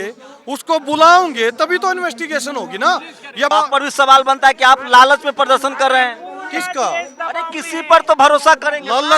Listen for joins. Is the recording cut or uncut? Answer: cut